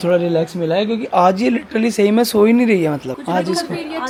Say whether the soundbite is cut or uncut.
uncut